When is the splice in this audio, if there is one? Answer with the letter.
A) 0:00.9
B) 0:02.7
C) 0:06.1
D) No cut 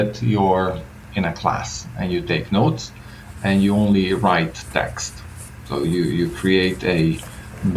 A